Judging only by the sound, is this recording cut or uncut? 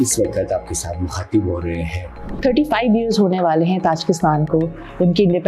cut